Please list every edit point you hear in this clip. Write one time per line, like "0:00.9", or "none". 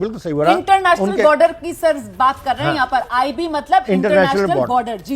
0:01.1

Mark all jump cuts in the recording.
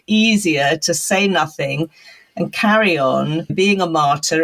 0:03.5

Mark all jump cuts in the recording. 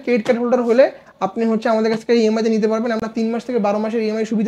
none

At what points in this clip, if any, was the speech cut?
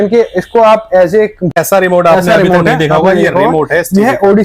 0:01.5

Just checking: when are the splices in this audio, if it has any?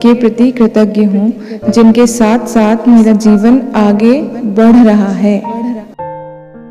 0:05.5

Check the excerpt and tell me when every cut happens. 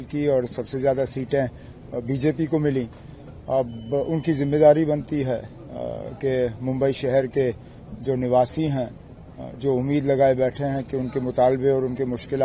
none

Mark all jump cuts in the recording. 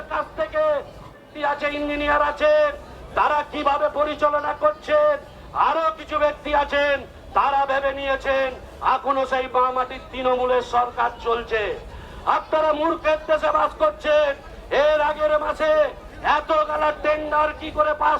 0:01.1

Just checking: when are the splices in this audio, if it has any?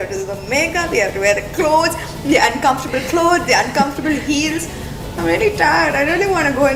none

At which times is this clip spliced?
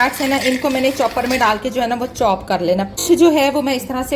0:03.0

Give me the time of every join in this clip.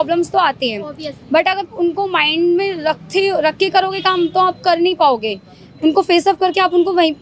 none

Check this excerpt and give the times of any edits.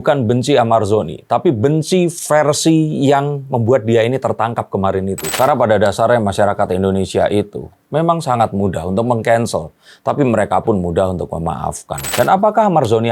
0:05.3
0:12.0

